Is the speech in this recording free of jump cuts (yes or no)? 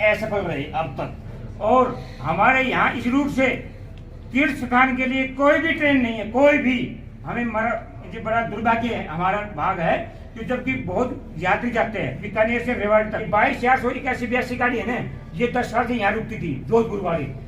no